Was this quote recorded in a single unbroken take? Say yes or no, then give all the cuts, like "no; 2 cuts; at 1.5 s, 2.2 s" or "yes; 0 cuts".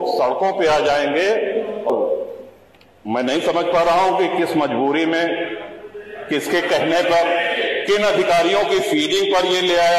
no; 1 cut; at 1.9 s